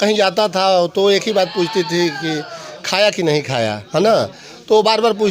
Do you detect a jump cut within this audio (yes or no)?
no